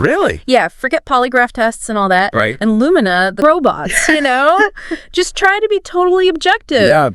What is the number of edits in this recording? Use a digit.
1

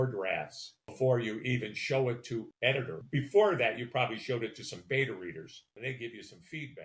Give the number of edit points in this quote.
2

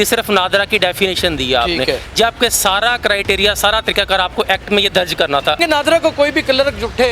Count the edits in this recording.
1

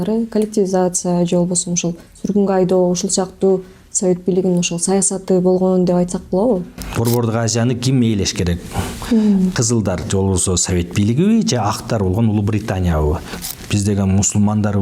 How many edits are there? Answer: 2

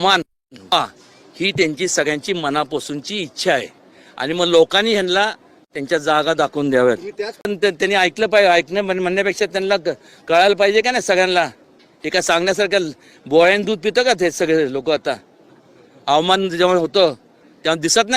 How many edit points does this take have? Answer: 0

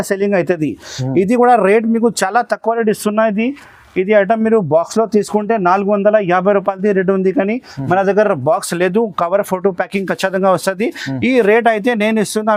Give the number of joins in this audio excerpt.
0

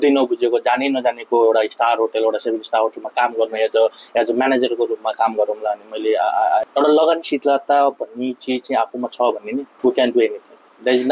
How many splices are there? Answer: 2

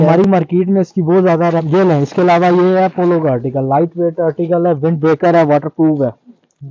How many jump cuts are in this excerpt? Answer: 1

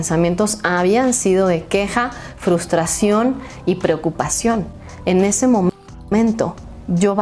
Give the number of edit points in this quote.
0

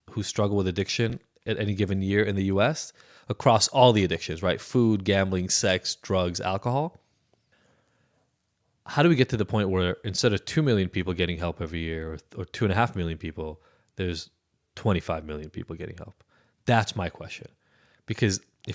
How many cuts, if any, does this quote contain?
1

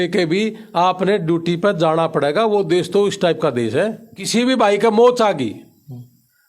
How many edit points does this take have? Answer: 1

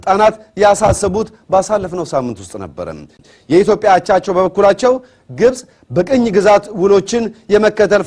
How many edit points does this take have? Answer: 1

